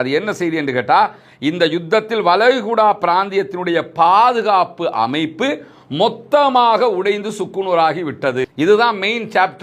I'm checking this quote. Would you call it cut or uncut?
uncut